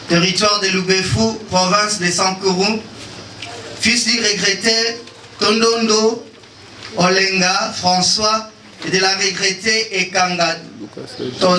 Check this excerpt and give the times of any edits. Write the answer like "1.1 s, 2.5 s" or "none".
none